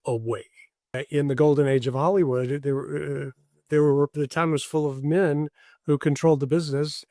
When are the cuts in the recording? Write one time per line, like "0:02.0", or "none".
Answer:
0:01.0